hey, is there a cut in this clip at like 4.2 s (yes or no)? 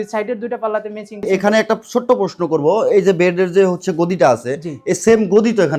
no